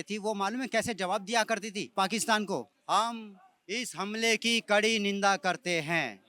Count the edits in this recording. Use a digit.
2